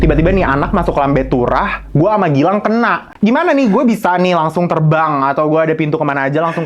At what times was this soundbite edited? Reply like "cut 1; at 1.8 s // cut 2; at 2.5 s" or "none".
cut 1; at 3.0 s